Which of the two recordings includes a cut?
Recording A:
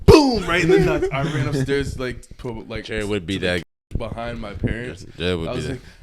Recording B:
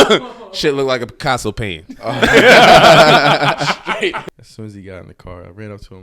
B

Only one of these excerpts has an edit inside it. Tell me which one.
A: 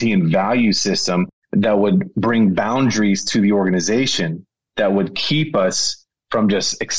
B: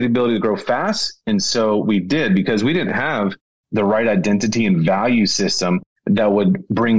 B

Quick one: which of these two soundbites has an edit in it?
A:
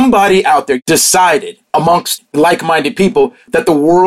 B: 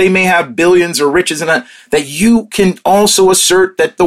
A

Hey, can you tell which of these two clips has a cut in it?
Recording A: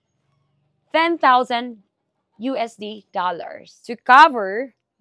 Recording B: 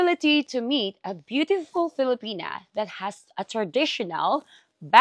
A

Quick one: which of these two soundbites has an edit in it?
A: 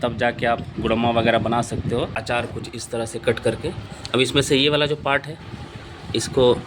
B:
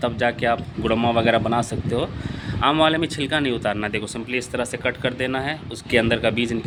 A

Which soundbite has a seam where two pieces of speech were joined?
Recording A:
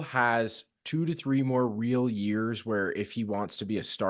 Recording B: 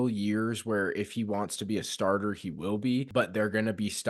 B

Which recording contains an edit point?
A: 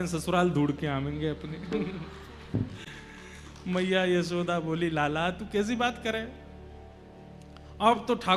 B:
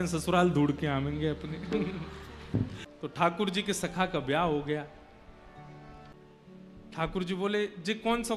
B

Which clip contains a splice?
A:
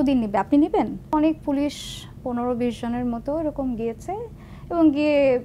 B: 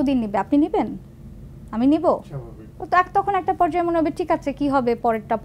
A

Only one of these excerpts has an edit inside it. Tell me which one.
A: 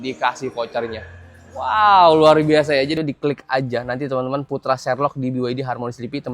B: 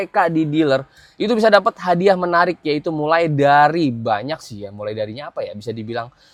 A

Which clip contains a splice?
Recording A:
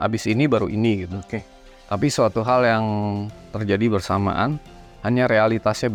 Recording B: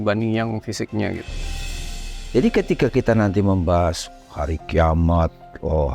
B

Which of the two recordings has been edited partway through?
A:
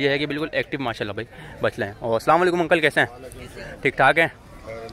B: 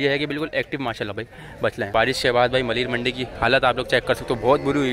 B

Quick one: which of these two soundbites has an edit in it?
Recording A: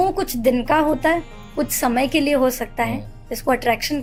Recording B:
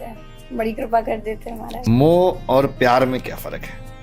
B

